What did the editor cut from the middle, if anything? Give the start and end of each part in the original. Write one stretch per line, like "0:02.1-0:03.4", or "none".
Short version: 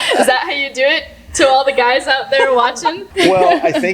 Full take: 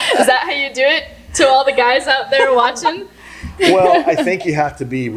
0:03.0-0:03.5

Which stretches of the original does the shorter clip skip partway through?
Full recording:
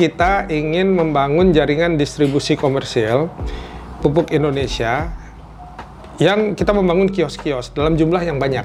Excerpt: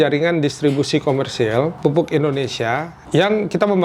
0:03.3-0:03.9
0:05.1-0:06.0

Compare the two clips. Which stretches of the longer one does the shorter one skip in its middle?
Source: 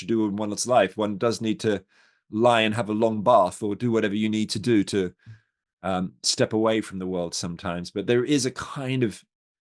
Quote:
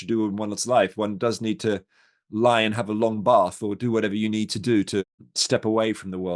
0:05.3-0:06.2

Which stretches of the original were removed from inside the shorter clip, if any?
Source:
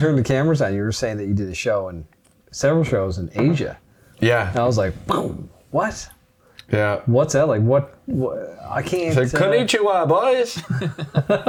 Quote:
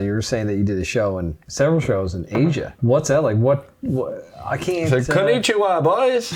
0:02.1-0:02.4
0:03.8-0:07.0

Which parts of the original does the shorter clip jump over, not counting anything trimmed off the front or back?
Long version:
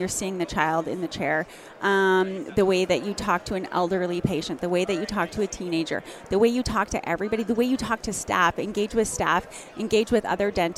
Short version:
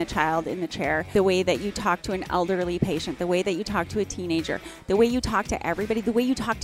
0:01.5-0:02.5

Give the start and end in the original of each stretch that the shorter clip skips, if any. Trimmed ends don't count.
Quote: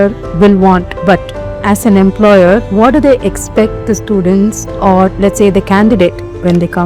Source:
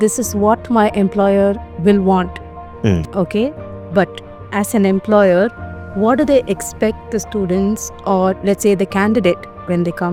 0:02.4-0:03.8
0:05.6-0:05.9

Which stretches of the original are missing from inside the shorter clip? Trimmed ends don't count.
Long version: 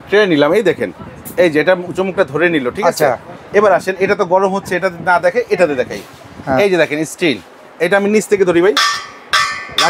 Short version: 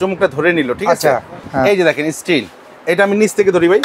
0:03.3-0:06.3

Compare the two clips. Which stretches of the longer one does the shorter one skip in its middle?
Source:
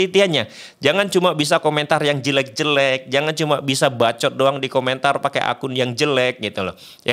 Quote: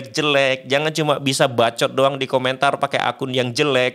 none

